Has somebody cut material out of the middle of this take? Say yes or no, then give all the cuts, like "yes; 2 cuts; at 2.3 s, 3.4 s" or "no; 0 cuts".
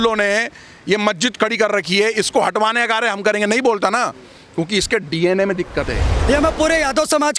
yes; 1 cut; at 6.1 s